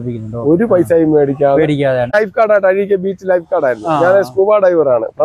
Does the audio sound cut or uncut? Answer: cut